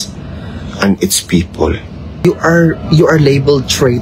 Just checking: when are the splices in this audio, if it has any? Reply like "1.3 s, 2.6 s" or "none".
2.2 s